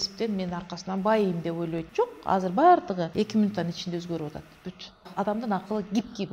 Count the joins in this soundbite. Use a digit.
3